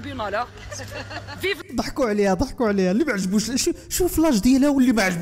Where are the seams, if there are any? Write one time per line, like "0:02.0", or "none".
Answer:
0:01.6